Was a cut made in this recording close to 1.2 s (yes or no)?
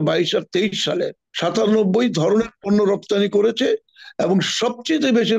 yes